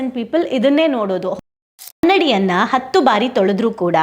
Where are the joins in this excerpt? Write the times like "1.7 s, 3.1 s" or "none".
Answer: 1.3 s